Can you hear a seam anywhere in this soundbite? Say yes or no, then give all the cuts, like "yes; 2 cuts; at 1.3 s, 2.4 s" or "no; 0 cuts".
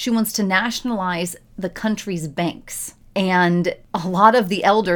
no; 0 cuts